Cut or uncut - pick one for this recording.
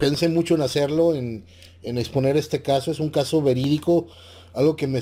uncut